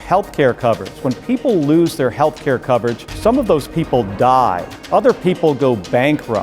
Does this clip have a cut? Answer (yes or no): yes